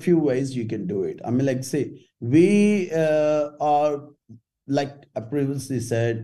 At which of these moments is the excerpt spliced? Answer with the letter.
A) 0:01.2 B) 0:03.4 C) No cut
C